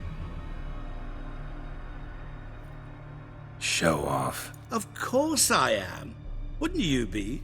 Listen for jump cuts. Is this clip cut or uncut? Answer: cut